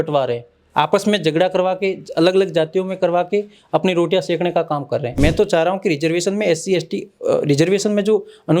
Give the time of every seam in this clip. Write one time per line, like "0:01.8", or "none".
0:05.2